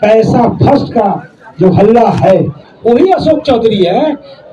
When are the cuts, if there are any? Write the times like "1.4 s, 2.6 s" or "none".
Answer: 2.6 s

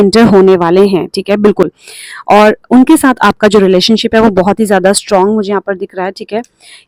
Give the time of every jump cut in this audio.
none

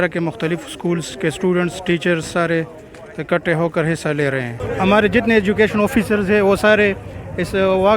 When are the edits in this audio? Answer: 4.5 s

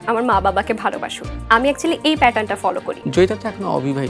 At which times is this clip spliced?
2.9 s

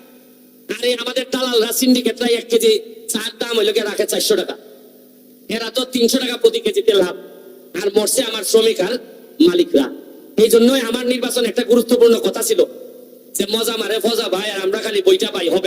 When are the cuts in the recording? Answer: none

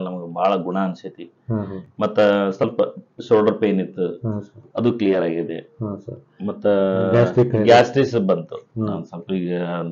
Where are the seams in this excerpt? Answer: none

